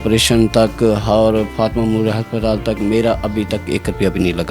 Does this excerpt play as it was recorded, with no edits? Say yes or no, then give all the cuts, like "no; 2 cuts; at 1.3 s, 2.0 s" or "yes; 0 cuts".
yes; 0 cuts